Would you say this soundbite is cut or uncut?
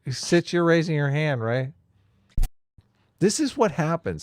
cut